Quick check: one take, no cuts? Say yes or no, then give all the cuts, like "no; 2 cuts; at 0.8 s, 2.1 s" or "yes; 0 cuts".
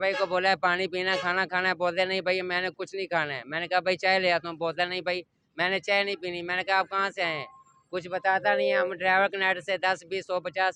yes; 0 cuts